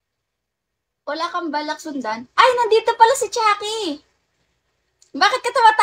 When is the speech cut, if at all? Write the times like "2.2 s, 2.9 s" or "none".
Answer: none